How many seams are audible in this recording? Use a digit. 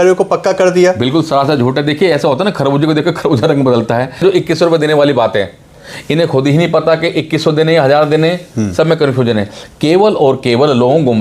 1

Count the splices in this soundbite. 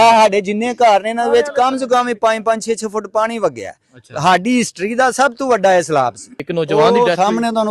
1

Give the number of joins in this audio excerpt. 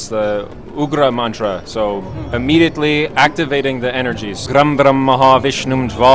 1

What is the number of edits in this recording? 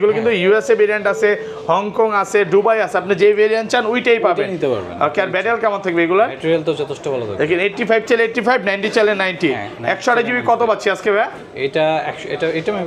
0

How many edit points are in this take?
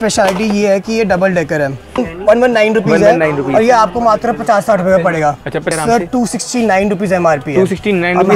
2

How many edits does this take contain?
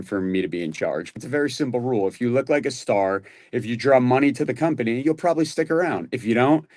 1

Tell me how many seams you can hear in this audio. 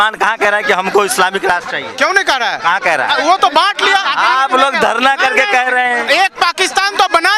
0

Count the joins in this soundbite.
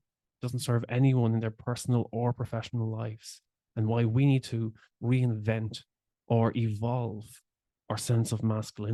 0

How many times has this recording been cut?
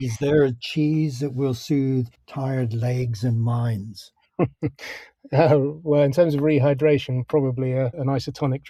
0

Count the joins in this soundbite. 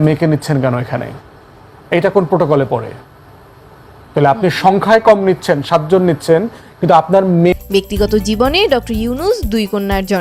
1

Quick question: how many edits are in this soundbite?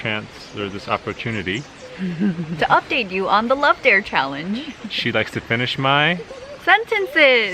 0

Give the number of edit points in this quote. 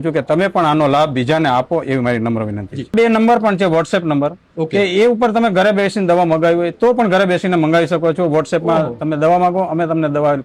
1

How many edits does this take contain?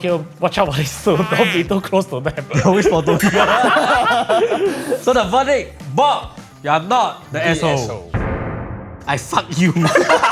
0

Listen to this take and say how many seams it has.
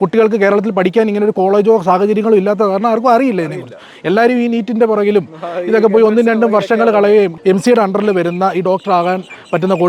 1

